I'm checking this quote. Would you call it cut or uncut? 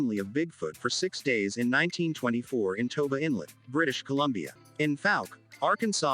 cut